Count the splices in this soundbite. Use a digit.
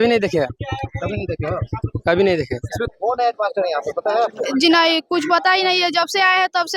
1